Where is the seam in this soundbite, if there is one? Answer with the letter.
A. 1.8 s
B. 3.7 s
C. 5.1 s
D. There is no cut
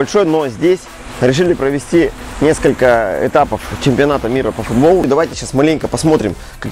C